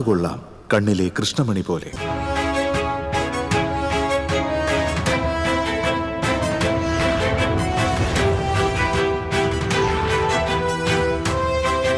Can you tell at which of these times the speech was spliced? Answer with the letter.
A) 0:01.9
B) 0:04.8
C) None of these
A